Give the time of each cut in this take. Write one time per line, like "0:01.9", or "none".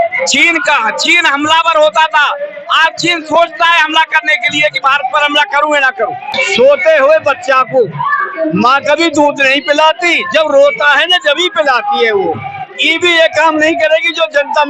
0:06.4